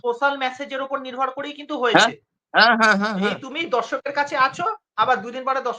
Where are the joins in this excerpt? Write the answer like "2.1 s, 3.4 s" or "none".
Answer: 3.5 s